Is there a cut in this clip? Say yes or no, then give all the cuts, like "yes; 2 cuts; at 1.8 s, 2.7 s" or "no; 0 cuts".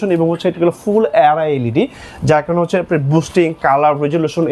no; 0 cuts